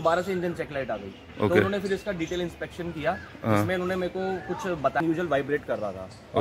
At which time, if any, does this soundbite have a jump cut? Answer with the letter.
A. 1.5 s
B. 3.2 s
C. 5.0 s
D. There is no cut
C